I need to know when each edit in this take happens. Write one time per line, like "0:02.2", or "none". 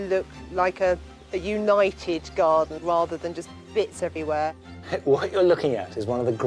0:02.8
0:04.7